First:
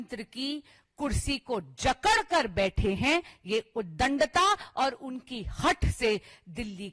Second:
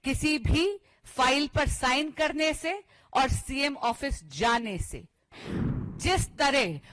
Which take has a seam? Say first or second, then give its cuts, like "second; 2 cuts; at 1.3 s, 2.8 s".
second; 1 cut; at 5.4 s